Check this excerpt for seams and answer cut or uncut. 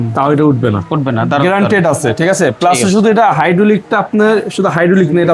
uncut